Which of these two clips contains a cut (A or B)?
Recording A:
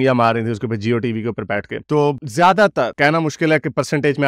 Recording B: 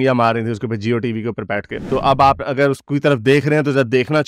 B